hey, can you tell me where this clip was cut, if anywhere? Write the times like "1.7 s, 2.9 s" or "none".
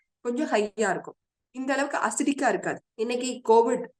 2.8 s